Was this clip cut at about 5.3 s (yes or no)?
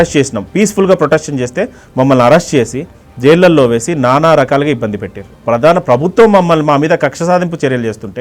yes